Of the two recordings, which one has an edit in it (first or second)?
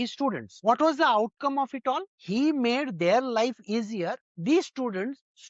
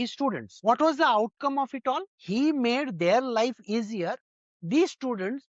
first